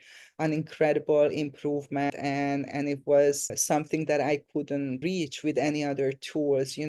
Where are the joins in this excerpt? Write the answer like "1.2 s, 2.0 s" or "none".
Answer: 2.1 s, 3.6 s, 5.0 s